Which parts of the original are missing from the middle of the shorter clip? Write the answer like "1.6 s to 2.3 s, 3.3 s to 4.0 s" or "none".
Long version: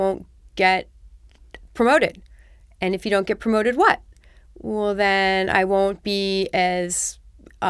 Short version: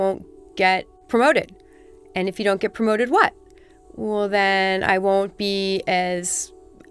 0.9 s to 1.6 s

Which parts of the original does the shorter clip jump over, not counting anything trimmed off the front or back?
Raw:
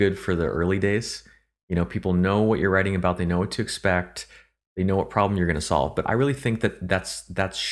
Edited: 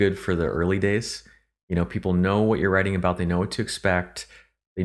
none

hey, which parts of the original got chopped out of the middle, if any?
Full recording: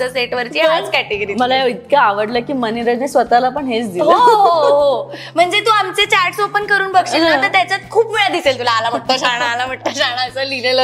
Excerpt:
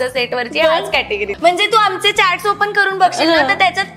1.3 s to 5.2 s

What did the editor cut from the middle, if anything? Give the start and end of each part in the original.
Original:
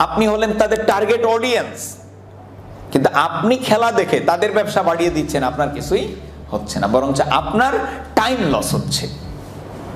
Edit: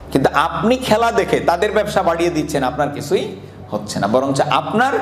none

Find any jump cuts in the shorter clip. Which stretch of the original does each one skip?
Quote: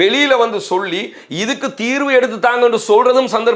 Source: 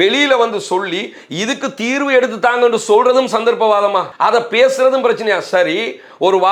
none

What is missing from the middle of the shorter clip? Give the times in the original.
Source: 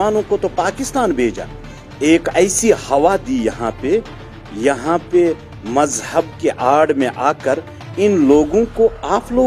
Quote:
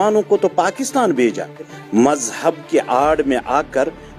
1.8 s to 5.5 s

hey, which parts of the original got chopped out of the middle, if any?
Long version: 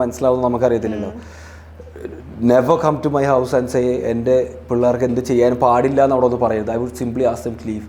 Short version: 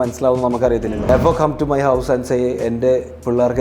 1.1 s to 2.5 s

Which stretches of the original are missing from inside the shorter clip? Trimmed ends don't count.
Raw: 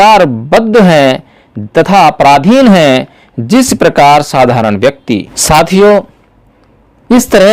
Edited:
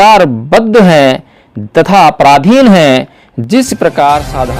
none

